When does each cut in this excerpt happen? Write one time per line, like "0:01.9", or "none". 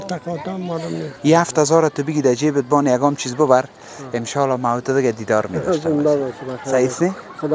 0:01.1